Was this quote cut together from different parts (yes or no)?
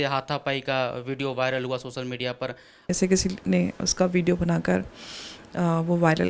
yes